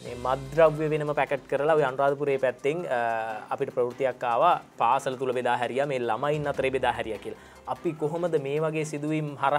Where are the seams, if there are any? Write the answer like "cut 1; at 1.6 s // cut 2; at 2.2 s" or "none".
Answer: none